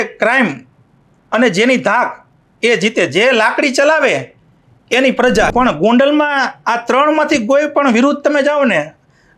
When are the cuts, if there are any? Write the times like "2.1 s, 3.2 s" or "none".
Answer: 5.5 s